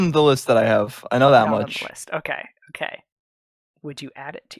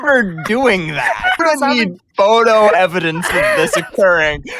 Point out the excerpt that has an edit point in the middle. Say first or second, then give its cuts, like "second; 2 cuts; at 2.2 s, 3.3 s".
second; 1 cut; at 1.4 s